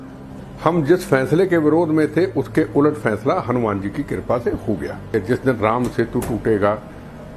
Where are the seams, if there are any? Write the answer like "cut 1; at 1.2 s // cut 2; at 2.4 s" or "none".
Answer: cut 1; at 5.1 s

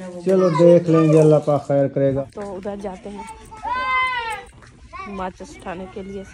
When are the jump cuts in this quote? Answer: cut 1; at 2.2 s

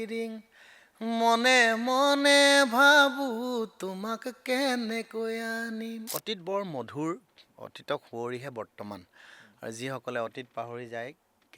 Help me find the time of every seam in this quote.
cut 1; at 6.1 s

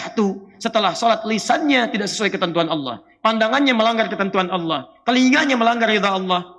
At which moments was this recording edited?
none

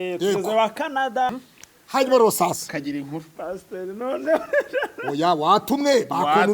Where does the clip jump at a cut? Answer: cut 1; at 1.3 s

